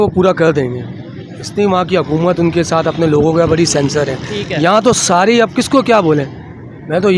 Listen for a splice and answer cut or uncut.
uncut